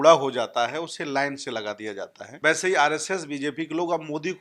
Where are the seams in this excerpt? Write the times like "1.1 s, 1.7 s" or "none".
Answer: 2.2 s